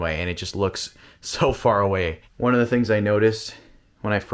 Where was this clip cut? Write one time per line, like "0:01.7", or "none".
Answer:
0:02.2